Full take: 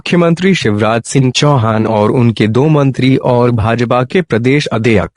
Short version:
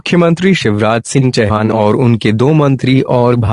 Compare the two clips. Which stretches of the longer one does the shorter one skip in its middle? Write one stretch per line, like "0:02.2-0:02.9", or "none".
0:01.4-0:01.6